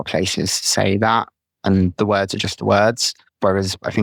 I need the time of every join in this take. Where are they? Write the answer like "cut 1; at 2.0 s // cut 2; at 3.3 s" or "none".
none